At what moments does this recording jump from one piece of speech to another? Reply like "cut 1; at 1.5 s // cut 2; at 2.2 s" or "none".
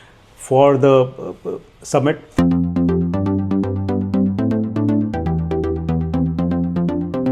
none